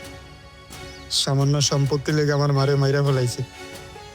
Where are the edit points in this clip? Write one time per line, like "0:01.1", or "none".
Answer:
0:00.9